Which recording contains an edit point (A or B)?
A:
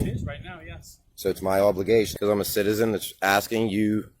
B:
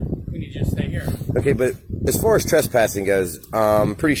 A